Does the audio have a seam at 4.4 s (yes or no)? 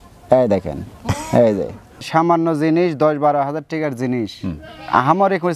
no